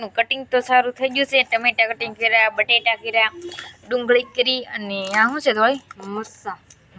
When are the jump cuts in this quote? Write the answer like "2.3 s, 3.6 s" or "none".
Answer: none